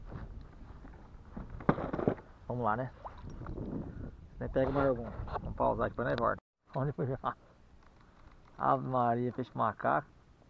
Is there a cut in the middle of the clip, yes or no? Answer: yes